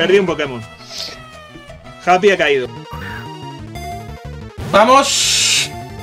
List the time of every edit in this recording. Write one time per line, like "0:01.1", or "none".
0:02.7

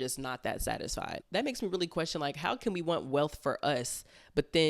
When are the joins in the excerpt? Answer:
0:01.3

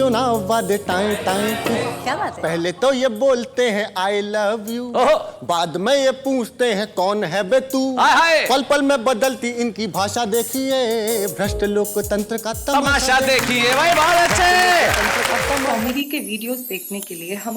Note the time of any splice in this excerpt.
0:15.7

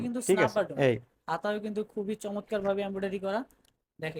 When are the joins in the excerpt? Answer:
none

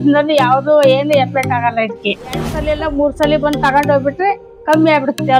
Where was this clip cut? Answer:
0:02.6

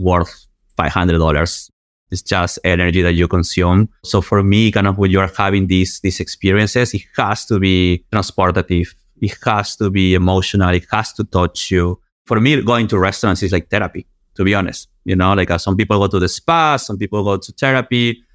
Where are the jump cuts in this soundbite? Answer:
0:04.1
0:08.0
0:12.3

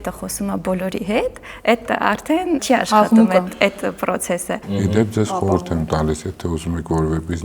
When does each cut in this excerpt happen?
0:02.6
0:04.7

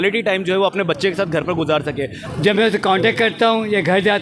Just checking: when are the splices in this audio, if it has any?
0:02.2

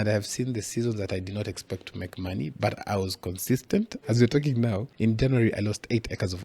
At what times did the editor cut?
0:04.0
0:04.9

